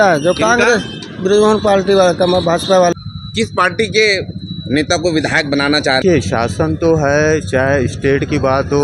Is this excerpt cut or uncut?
cut